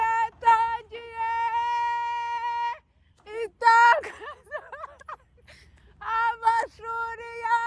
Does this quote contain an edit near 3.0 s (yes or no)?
no